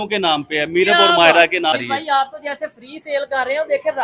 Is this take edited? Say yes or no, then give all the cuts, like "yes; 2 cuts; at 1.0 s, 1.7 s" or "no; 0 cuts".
yes; 1 cut; at 1.7 s